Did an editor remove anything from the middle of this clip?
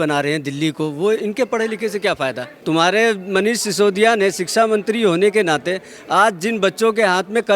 yes; 1 cut; at 2.5 s

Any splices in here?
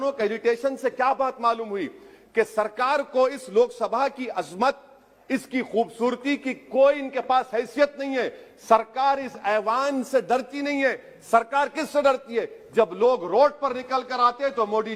no; 0 cuts

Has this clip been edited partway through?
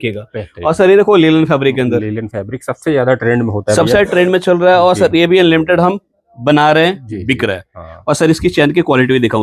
no; 0 cuts

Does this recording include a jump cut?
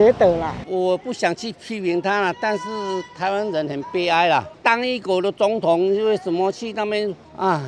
no; 0 cuts

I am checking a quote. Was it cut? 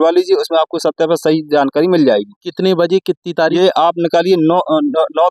no; 0 cuts

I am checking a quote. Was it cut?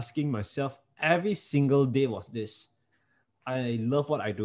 no; 0 cuts

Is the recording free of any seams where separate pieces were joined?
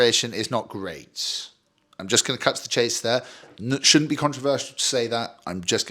yes; 0 cuts

